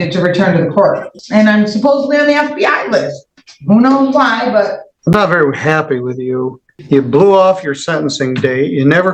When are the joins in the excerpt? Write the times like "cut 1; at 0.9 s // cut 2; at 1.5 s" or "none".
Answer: cut 1; at 1.1 s // cut 2; at 4.8 s // cut 3; at 6.7 s